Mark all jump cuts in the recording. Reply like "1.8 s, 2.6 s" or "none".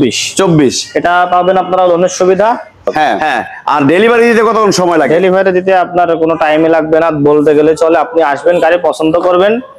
3.2 s